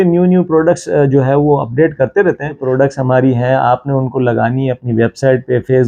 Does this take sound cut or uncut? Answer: cut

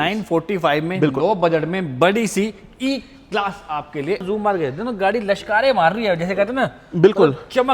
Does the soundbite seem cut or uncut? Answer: cut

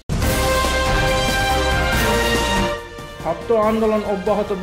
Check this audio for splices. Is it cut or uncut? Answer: cut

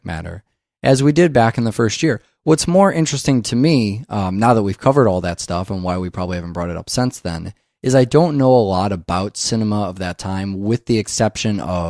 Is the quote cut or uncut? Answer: cut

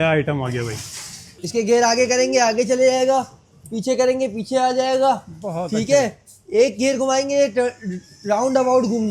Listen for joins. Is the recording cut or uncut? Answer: cut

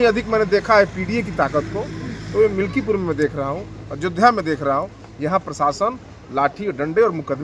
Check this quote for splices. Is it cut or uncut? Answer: uncut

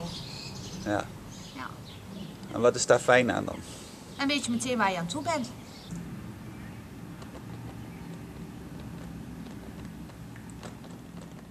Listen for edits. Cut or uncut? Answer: uncut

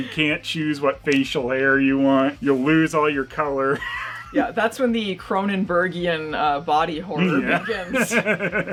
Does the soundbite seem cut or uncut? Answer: uncut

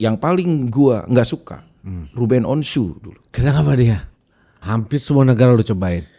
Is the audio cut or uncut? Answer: cut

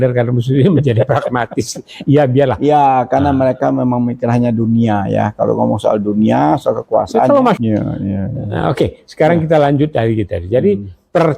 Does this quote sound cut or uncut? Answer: cut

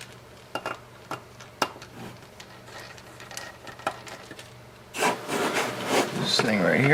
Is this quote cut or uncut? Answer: cut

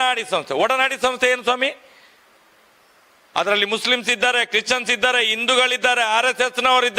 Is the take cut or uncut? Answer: uncut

